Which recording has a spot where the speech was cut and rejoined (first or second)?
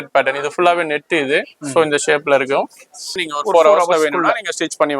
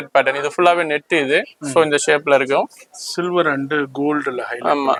first